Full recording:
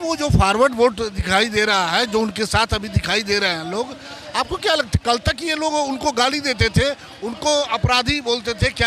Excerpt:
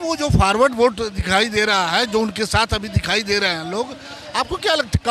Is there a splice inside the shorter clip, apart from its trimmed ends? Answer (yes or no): no